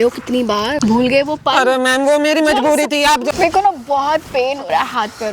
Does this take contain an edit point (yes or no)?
yes